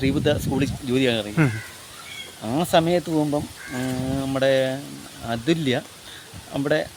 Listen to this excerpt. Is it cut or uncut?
uncut